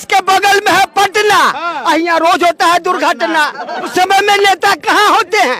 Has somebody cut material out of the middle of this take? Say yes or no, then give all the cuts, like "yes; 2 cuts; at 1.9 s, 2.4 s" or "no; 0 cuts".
yes; 1 cut; at 3.9 s